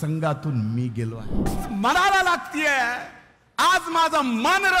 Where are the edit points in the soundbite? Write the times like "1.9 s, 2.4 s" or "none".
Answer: 1.6 s